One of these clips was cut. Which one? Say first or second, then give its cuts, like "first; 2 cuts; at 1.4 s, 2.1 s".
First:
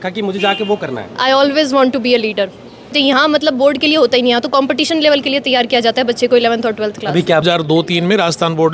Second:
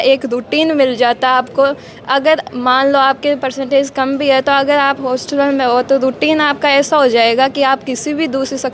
first; 2 cuts; at 2.9 s, 7.4 s